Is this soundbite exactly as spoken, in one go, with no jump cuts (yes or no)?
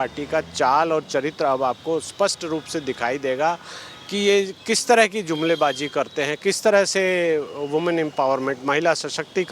yes